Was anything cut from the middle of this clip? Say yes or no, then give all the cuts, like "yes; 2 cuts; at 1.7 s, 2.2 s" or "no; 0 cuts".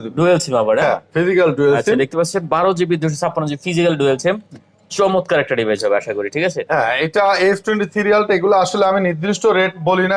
no; 0 cuts